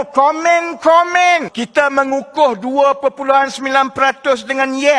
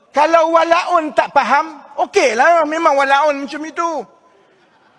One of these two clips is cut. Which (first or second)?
first